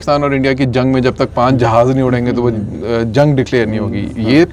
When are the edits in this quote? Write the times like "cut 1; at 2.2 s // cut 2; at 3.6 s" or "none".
none